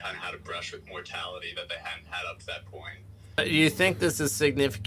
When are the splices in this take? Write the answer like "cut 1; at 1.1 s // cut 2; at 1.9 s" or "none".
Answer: cut 1; at 3.4 s